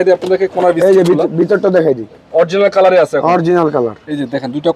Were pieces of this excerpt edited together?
no; 0 cuts

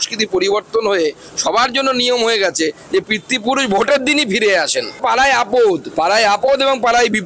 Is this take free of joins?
no; 1 cut; at 5.0 s

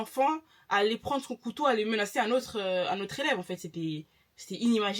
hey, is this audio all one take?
yes; 0 cuts

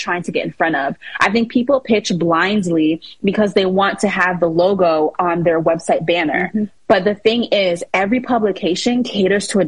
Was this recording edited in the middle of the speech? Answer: no; 0 cuts

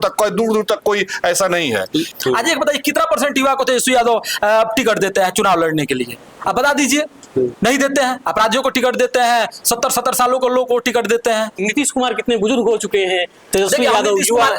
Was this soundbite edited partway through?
yes; 2 cuts; at 2.1 s, 11.6 s

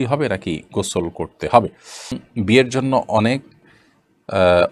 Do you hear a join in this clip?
yes; 1 cut; at 2.2 s

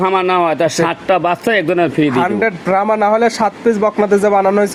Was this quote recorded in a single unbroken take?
yes; 0 cuts

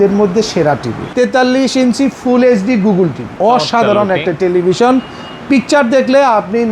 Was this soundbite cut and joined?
yes; 2 cuts; at 1.0 s, 3.3 s

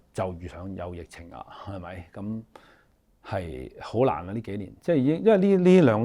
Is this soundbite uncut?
yes; 0 cuts

